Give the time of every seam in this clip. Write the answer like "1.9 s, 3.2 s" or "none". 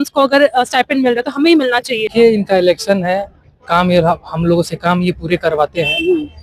2.1 s